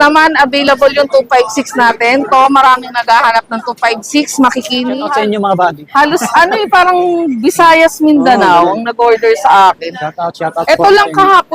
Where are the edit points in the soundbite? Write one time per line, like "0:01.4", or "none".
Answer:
0:04.9